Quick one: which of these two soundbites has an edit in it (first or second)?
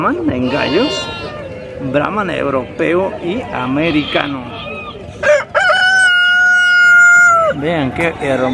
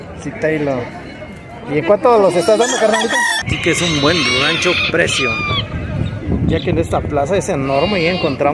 second